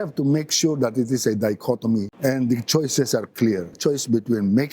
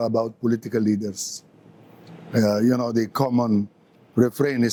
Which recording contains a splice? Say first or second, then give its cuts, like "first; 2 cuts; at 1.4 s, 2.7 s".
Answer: first; 2 cuts; at 2.1 s, 3.7 s